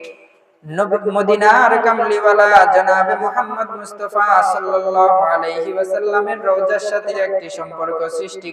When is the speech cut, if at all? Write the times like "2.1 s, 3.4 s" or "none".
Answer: 7.1 s